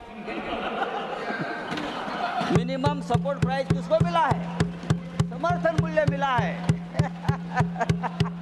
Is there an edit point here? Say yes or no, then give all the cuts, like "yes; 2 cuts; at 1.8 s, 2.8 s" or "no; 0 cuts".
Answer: no; 0 cuts